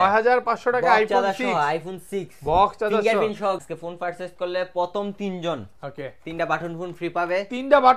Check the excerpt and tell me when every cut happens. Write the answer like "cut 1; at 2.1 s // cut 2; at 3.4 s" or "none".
cut 1; at 3.7 s

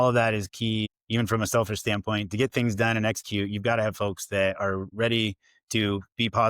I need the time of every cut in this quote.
cut 1; at 0.9 s // cut 2; at 4.9 s

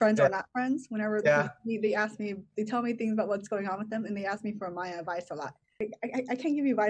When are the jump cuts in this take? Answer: cut 1; at 5.8 s

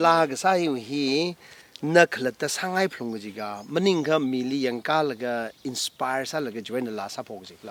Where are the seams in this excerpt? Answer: none

